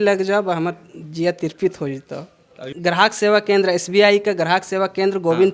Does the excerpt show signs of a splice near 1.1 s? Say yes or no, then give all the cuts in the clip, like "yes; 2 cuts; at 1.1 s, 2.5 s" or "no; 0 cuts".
no; 1 cut; at 2.7 s